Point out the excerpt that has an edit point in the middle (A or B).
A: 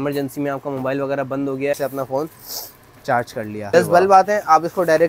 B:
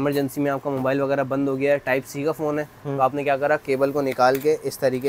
A